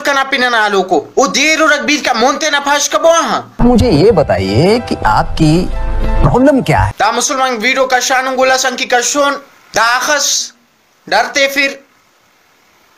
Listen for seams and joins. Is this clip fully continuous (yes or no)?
no